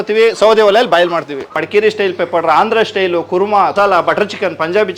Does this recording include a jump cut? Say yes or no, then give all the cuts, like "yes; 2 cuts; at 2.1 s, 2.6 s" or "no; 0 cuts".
yes; 2 cuts; at 1.6 s, 3.7 s